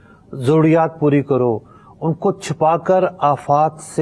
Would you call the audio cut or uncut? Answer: uncut